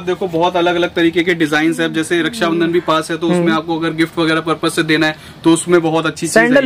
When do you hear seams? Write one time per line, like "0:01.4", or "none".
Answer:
none

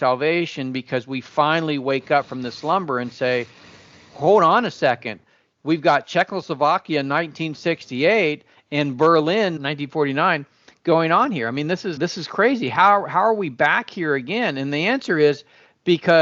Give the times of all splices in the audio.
0:09.6
0:12.0

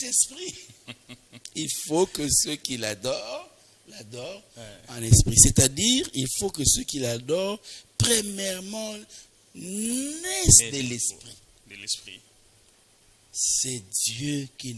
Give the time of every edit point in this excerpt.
0:12.7

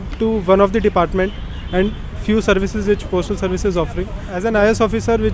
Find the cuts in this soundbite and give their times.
0:04.3

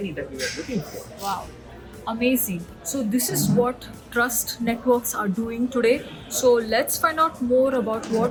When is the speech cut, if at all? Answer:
none

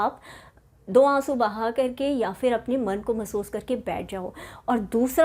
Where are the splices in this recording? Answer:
none

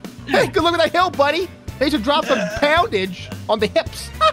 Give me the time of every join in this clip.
none

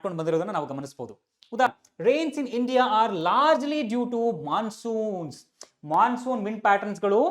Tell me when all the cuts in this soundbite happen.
0:01.7

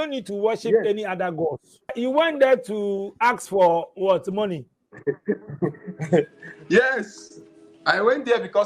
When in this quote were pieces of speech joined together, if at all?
0:02.0

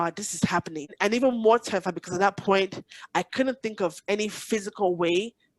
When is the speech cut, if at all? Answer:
0:00.9

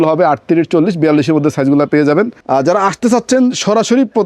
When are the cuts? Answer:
0:02.4

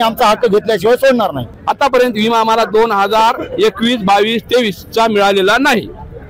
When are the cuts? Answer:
0:01.5

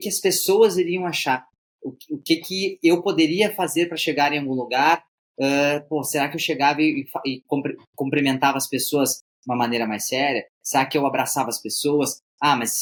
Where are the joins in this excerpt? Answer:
none

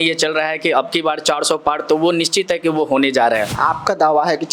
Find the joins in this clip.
0:03.5

